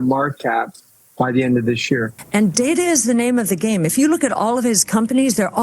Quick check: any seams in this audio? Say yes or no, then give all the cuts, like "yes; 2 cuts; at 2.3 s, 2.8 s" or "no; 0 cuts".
yes; 1 cut; at 2.2 s